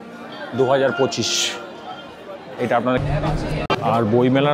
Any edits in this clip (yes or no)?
yes